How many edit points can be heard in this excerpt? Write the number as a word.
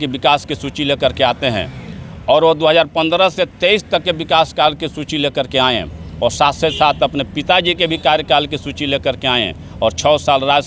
zero